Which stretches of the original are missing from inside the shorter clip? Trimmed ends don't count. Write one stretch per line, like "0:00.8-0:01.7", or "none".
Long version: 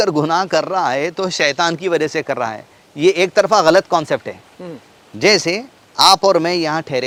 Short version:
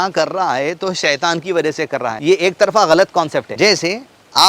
0:02.5-0:02.9
0:04.3-0:05.1